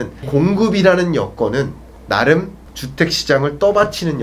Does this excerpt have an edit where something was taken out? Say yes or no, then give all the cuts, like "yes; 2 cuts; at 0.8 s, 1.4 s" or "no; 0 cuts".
no; 0 cuts